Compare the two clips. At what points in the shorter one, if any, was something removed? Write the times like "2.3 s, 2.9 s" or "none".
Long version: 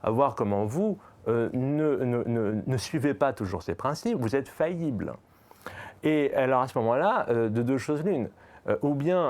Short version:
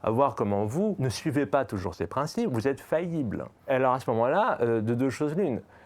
1.1 s, 3.7 s